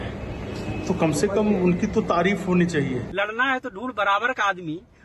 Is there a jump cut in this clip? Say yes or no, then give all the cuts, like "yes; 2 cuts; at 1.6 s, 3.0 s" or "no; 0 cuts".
yes; 1 cut; at 3.1 s